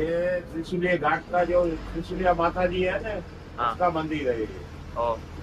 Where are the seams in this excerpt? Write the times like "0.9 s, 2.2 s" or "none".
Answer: none